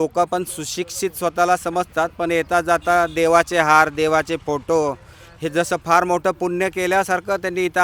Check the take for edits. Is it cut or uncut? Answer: uncut